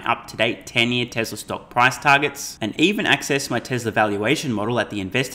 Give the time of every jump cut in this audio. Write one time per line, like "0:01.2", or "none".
none